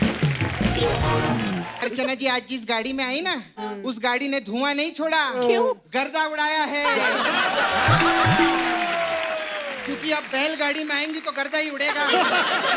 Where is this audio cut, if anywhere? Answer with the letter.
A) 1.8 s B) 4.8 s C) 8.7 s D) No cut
A